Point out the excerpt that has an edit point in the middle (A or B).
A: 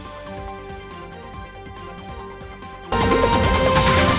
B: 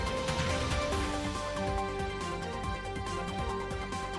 A